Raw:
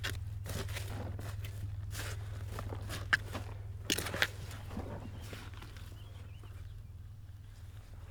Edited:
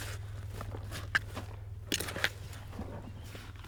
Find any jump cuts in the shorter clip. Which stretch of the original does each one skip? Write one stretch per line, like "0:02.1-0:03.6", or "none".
none